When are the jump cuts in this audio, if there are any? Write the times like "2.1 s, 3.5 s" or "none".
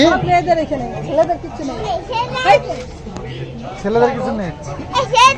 none